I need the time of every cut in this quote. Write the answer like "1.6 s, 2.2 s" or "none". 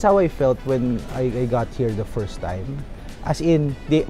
none